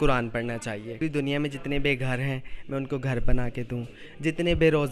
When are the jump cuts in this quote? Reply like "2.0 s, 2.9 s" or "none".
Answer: 1.0 s

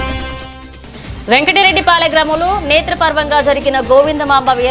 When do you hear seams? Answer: 0.9 s

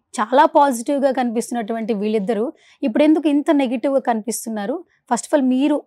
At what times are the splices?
none

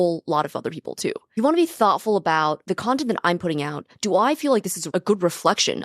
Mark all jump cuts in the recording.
1.3 s, 2.6 s, 4.8 s

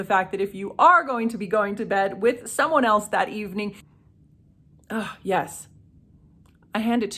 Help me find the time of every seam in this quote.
3.8 s

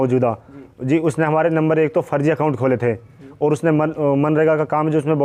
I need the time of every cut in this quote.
none

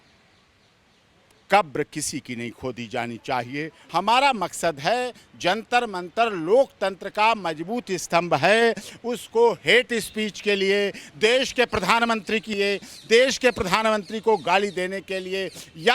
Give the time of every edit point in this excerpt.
3.8 s

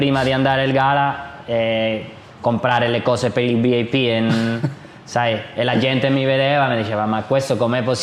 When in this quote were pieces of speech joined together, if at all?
none

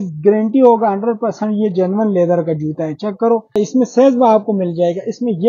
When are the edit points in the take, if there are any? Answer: 3.6 s

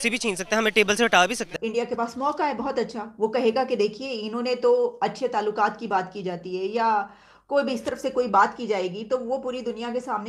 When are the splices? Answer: 1.5 s

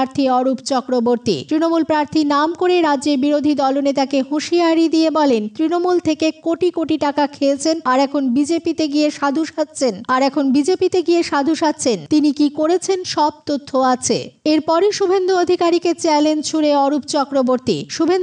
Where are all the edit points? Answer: none

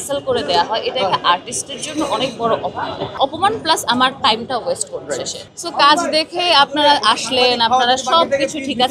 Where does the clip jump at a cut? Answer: 3.1 s, 5.4 s

